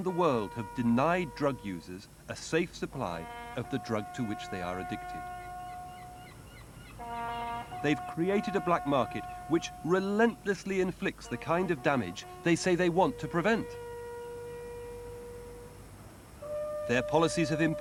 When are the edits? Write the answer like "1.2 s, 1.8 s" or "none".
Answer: none